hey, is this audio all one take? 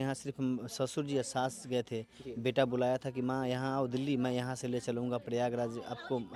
yes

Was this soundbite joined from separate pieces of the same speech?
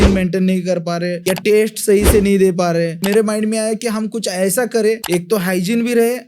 yes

